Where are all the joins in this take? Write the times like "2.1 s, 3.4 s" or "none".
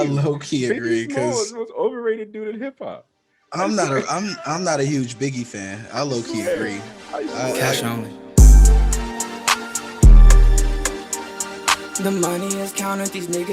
7.8 s